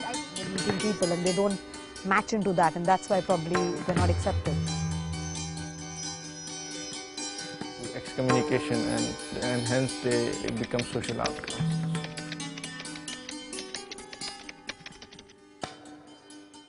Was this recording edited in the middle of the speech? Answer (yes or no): no